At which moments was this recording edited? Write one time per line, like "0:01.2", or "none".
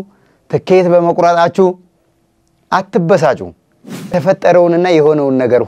0:04.1